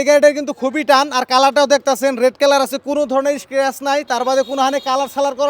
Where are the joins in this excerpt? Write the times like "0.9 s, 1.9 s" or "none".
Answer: none